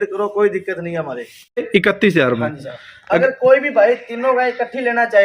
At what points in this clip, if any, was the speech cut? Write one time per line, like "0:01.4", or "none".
0:01.6